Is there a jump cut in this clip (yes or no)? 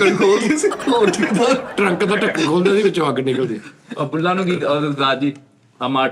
no